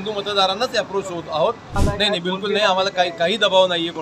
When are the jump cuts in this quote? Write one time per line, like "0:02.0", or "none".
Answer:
0:01.8